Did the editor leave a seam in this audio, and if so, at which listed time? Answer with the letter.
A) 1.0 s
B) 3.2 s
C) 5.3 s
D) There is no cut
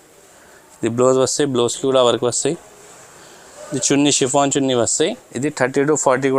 C